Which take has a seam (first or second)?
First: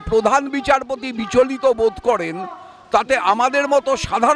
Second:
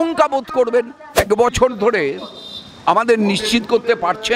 second